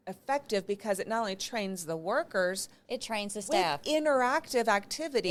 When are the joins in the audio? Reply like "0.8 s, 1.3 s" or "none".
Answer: none